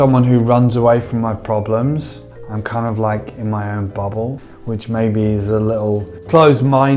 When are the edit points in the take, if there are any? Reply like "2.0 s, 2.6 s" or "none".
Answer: 2.3 s, 4.4 s